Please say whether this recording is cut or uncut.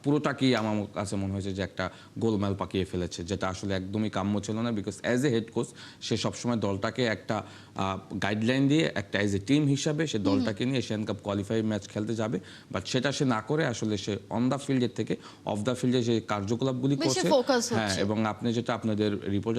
uncut